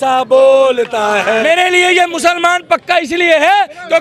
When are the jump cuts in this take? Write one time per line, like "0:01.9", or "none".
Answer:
0:01.4

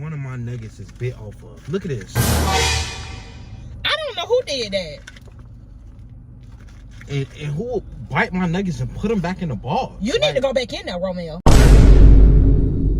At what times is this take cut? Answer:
0:11.3

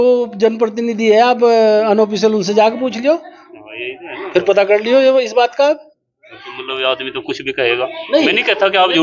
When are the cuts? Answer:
none

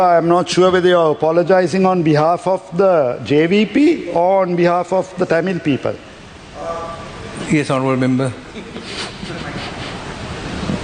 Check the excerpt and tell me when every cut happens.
none

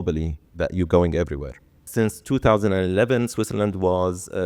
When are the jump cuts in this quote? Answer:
0:01.9

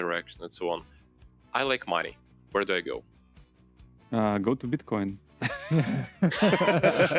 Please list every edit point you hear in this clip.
none

